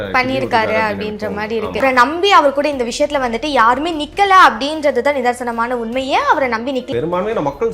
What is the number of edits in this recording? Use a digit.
2